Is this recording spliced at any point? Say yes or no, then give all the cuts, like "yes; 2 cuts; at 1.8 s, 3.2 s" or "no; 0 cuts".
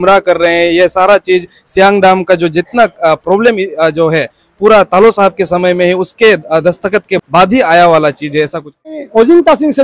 yes; 2 cuts; at 7.2 s, 9.0 s